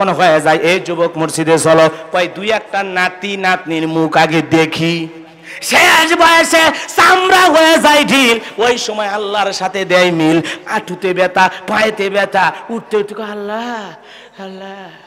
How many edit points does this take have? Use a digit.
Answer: 0